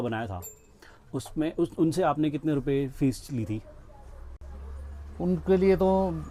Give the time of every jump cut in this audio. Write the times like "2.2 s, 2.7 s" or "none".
none

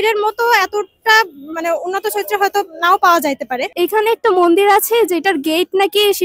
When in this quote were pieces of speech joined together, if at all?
3.7 s

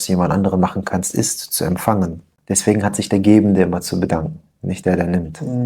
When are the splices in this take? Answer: 2.3 s

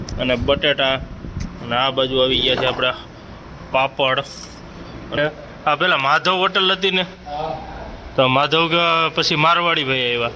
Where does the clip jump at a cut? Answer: 5.2 s

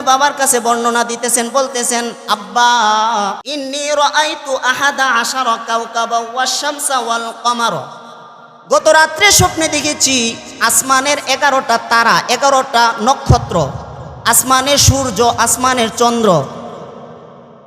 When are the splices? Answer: 3.4 s

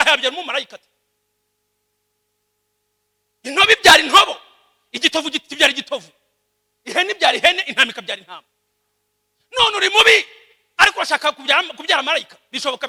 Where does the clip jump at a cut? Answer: none

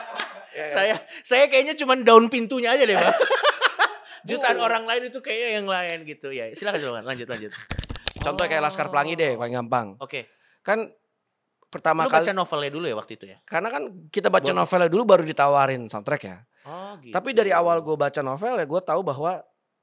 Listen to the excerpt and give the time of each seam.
8.0 s

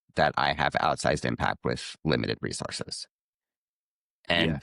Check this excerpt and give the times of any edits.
none

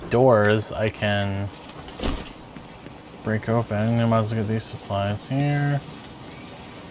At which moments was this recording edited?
5.8 s

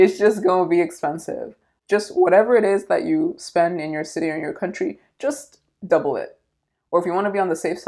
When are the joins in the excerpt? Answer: 1.7 s

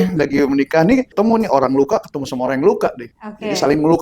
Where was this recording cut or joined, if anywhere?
1.1 s

